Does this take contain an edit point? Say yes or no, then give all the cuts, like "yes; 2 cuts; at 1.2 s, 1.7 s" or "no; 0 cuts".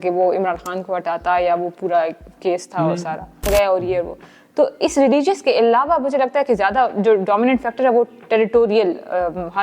yes; 1 cut; at 3.4 s